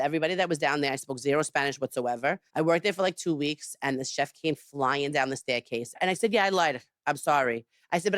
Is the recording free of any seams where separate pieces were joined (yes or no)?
no